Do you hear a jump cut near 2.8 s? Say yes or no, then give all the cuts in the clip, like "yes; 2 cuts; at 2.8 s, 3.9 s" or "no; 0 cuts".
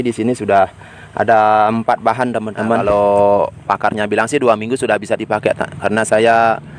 yes; 1 cut; at 2.8 s